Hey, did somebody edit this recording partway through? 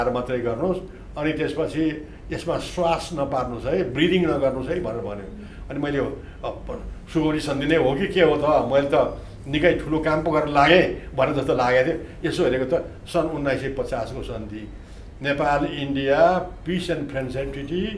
no; 0 cuts

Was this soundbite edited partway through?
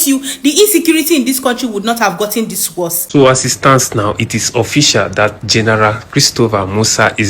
yes; 1 cut; at 3.0 s

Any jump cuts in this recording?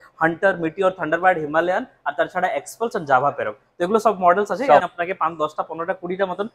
yes; 1 cut; at 4.8 s

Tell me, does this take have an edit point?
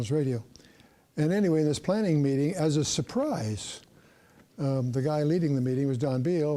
no; 0 cuts

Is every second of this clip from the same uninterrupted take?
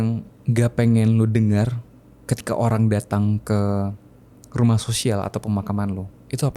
yes; 0 cuts

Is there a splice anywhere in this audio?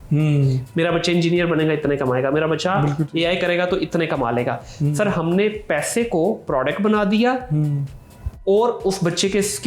no; 0 cuts

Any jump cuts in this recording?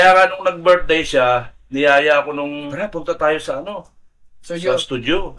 yes; 1 cut; at 2.7 s

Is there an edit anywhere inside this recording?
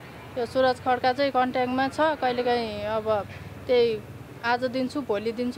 no; 0 cuts

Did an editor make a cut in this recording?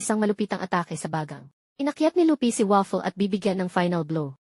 yes; 1 cut; at 1.6 s

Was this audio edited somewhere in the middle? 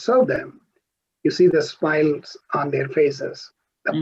no; 0 cuts

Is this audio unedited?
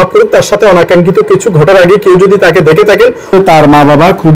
no; 1 cut; at 3.3 s

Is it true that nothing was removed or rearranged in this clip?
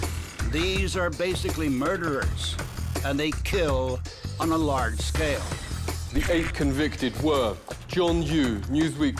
no; 1 cut; at 6.8 s

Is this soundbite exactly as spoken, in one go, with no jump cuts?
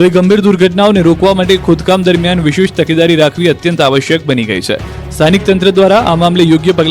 no; 1 cut; at 5.6 s

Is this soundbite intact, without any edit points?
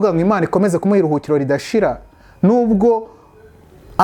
yes; 0 cuts

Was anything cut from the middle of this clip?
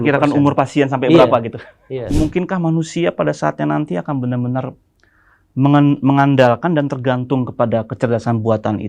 yes; 1 cut; at 2.1 s

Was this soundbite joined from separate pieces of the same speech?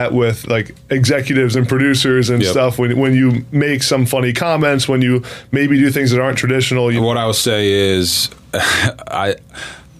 yes; 1 cut; at 7.0 s

